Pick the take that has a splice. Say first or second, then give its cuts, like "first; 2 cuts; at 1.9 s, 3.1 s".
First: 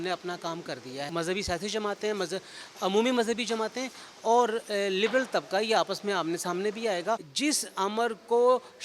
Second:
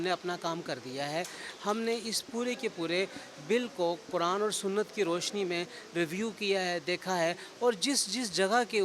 first; 2 cuts; at 1.1 s, 7.3 s